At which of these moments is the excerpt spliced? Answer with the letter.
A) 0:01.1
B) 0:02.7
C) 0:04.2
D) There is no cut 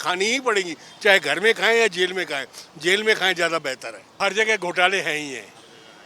C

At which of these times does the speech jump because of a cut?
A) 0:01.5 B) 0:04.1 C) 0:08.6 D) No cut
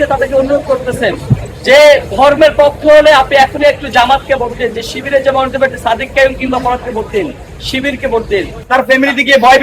C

